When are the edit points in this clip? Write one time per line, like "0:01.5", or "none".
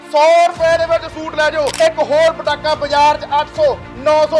0:01.7